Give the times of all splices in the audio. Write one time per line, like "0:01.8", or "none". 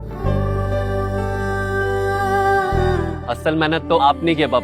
0:03.0